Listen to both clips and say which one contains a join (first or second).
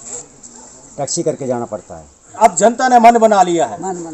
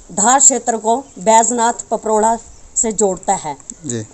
first